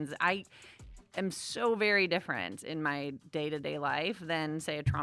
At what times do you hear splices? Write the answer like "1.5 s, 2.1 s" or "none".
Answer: none